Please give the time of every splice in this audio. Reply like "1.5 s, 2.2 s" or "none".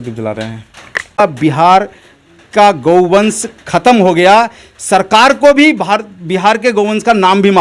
1.2 s